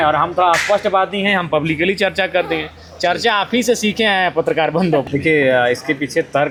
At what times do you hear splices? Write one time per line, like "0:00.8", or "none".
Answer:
none